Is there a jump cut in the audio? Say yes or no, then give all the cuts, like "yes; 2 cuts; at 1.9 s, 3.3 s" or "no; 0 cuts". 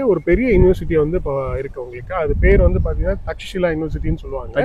no; 0 cuts